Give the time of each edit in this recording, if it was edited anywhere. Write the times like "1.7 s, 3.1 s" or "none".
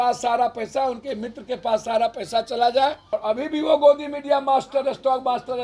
3.0 s